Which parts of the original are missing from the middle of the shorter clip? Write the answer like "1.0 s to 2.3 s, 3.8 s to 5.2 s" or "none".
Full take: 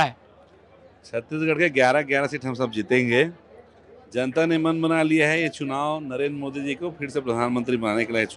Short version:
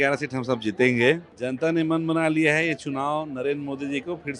3.4 s to 4.1 s